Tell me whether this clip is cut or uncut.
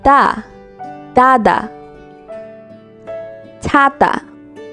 cut